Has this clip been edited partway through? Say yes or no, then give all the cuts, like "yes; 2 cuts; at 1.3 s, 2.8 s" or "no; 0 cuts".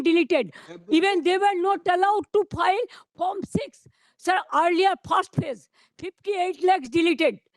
no; 0 cuts